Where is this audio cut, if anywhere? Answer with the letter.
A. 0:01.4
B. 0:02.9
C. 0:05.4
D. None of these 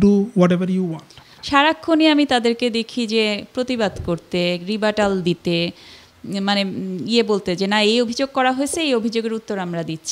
A